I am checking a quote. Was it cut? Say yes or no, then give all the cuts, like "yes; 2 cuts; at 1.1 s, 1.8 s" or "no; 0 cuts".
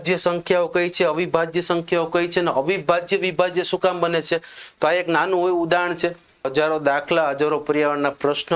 yes; 1 cut; at 6.5 s